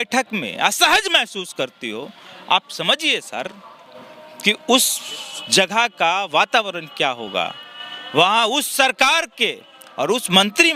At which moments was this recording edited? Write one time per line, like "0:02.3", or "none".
none